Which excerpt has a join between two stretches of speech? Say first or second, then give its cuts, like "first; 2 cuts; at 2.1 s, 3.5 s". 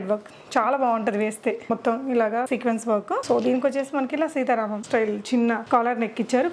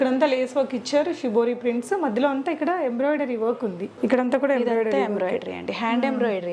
first; 4 cuts; at 1.7 s, 2.7 s, 4.8 s, 5.6 s